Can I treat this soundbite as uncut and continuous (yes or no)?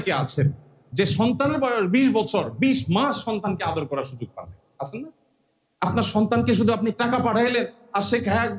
yes